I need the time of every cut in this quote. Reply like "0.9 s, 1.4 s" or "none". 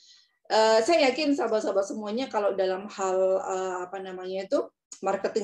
none